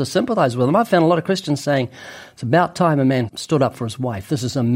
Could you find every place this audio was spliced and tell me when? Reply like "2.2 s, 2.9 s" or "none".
3.3 s